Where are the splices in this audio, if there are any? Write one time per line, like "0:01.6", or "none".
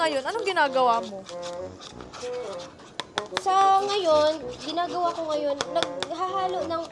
none